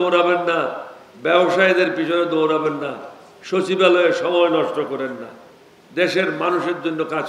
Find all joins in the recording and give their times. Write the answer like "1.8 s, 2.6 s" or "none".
none